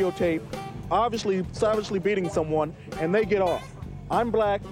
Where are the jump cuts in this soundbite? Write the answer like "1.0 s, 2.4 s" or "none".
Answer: none